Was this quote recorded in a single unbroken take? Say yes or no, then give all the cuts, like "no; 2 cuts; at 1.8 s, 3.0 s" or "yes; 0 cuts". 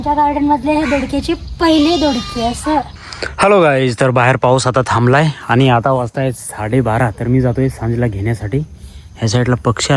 yes; 0 cuts